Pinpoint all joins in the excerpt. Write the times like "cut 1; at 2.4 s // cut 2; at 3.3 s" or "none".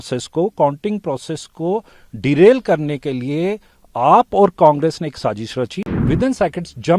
cut 1; at 5.9 s